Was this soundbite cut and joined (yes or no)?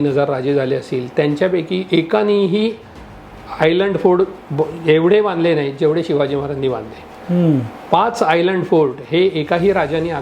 no